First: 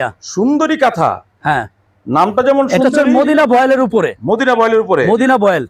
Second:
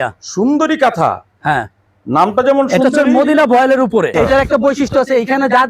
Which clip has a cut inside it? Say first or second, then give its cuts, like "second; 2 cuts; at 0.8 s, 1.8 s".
second; 1 cut; at 4.1 s